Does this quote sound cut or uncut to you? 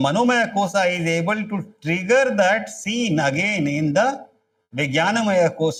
uncut